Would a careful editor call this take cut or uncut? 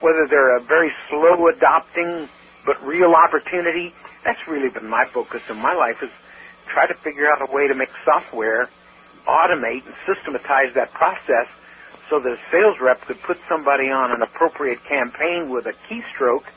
uncut